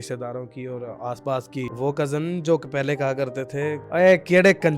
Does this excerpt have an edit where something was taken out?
yes; 2 cuts; at 1.7 s, 3.8 s

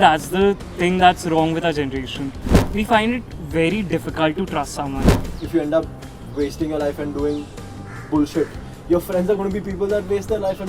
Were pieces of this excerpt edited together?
yes; 2 cuts; at 2.6 s, 5.3 s

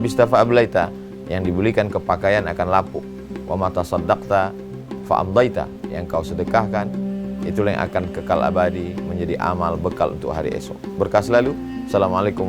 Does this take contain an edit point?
no; 0 cuts

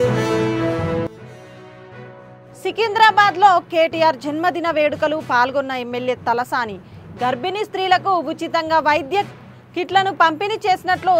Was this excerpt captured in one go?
no; 1 cut; at 0.9 s

